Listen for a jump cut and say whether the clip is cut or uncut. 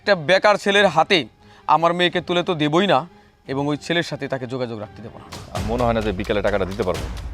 cut